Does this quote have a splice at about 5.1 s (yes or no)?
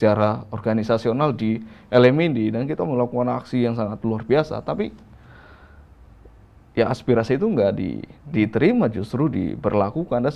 no